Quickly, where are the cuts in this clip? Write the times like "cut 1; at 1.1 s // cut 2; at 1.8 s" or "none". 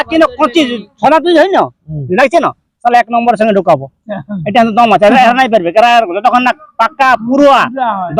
none